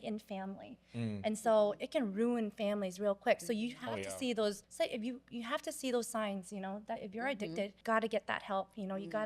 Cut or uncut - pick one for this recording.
cut